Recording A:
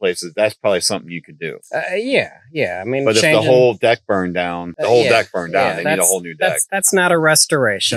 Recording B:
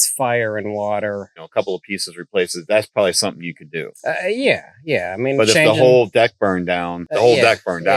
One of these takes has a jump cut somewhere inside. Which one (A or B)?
B